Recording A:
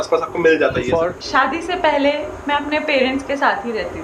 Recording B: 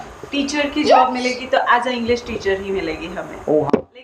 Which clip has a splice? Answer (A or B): A